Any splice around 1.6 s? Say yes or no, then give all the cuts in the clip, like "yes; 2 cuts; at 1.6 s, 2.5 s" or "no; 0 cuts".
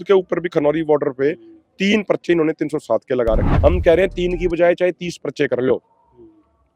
no; 1 cut; at 3.5 s